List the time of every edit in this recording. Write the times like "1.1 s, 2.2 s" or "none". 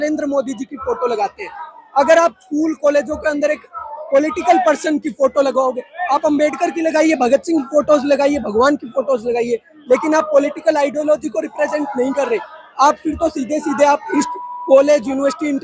none